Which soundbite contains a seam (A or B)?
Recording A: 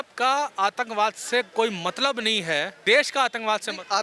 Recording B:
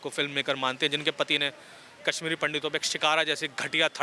A